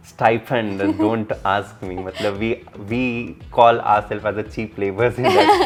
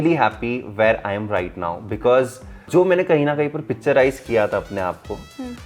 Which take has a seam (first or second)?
second